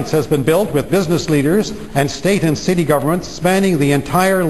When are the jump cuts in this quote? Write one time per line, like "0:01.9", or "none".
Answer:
none